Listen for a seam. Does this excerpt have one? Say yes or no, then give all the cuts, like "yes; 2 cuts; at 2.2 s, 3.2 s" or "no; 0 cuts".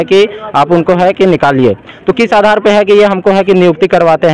no; 0 cuts